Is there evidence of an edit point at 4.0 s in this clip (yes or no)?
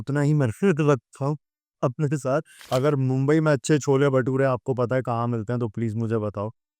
no